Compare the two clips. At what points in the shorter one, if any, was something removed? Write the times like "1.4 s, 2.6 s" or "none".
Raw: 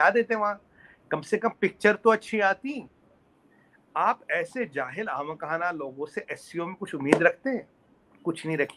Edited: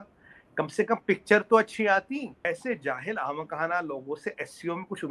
2.4 s